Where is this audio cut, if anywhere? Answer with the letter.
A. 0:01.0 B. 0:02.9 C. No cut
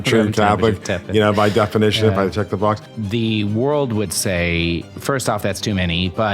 B